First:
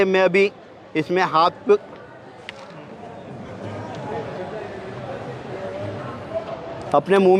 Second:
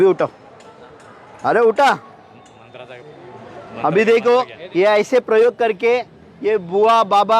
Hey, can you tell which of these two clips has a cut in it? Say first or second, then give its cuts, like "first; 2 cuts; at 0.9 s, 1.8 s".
second; 1 cut; at 4.6 s